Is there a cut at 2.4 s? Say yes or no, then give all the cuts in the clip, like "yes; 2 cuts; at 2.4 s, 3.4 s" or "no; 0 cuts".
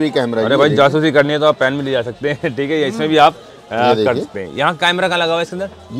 no; 0 cuts